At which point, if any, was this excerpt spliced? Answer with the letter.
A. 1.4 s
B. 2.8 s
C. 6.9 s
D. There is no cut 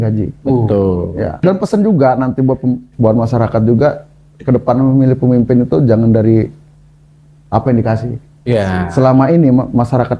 A